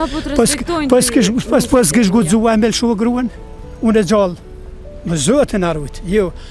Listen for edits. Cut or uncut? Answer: uncut